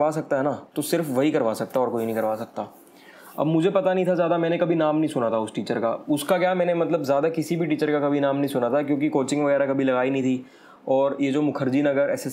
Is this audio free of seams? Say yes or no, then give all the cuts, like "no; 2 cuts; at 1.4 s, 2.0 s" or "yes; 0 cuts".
yes; 0 cuts